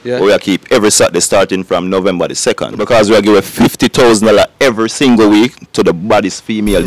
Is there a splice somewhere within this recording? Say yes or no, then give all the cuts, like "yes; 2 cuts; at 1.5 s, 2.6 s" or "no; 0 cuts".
yes; 1 cut; at 2.8 s